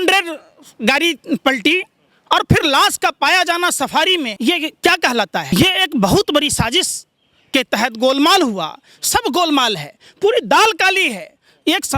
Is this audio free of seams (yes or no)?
no